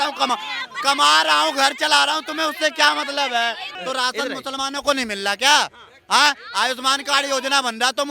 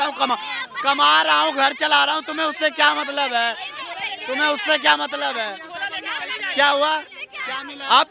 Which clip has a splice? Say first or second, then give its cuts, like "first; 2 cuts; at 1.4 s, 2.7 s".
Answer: first; 1 cut; at 3.7 s